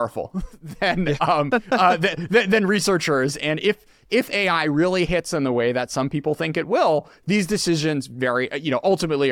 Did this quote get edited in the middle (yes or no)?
no